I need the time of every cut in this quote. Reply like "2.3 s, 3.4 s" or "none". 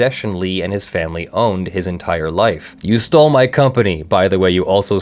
2.7 s